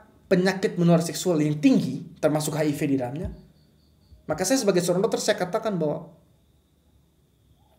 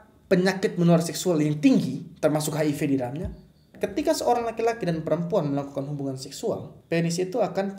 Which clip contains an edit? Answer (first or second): second